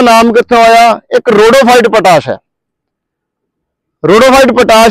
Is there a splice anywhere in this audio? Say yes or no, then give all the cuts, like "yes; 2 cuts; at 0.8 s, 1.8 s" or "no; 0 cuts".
no; 0 cuts